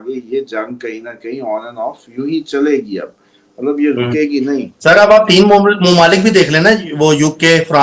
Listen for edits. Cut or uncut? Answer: uncut